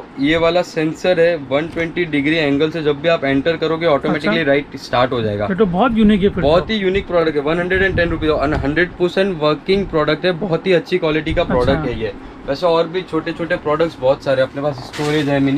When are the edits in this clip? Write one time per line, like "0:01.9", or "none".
none